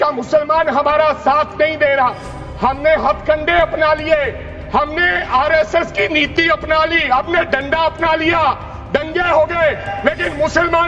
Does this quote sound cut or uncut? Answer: uncut